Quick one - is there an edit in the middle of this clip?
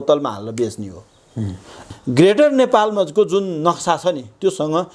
yes; 1 cut; at 1.7 s

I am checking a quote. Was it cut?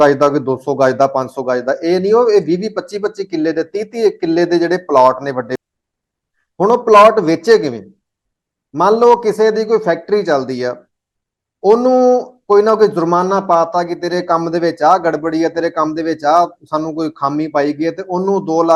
yes; 1 cut; at 5.6 s

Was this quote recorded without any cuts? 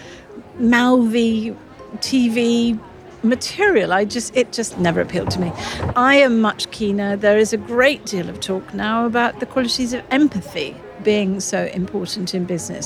no; 2 cuts; at 4.7 s, 5.9 s

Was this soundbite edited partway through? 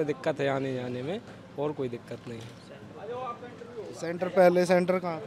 no; 0 cuts

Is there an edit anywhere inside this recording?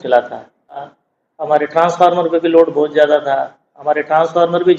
yes; 1 cut; at 0.9 s

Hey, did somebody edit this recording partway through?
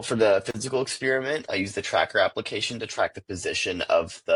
no; 0 cuts

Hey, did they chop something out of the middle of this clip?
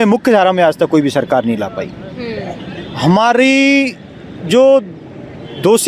no; 0 cuts

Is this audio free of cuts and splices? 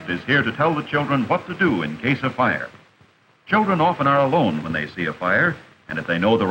no; 1 cut; at 0.9 s

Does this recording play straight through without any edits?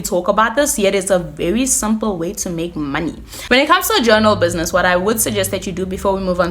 yes; 0 cuts

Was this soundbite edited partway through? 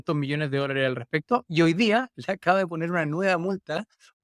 no; 0 cuts

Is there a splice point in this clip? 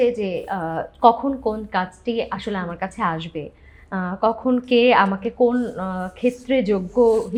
no; 0 cuts

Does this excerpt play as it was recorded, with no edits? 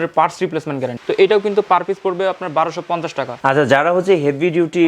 no; 2 cuts; at 1.0 s, 3.3 s

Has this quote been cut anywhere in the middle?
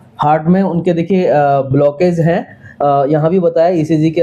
no; 0 cuts

